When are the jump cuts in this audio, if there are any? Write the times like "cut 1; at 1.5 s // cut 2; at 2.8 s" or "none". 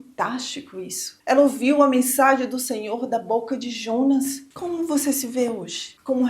cut 1; at 1.1 s // cut 2; at 4.4 s